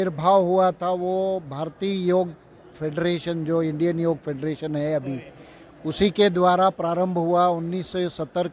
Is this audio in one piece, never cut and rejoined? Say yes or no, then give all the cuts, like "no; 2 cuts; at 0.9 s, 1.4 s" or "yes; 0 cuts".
yes; 0 cuts